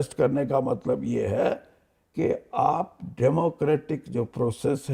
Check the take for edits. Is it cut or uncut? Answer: uncut